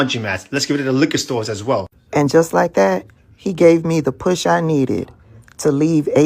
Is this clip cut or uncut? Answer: uncut